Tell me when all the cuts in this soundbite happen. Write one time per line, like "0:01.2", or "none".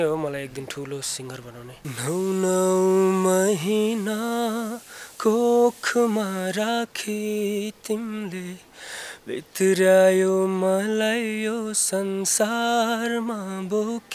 0:01.7